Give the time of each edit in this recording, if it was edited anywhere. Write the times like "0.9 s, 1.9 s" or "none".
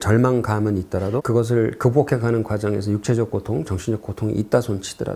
1.2 s